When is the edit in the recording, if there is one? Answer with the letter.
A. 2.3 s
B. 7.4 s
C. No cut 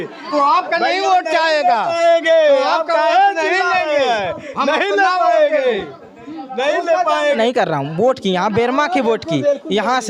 B